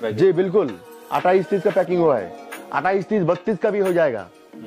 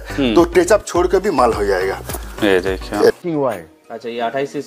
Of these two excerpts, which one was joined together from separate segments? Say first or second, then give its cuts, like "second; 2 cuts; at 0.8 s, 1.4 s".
second; 1 cut; at 3.2 s